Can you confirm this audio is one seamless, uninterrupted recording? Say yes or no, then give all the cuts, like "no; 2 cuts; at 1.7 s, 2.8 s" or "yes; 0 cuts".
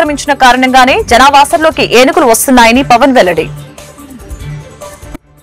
no; 1 cut; at 3.5 s